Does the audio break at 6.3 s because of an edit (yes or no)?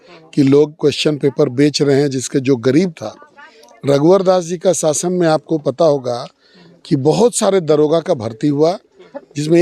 no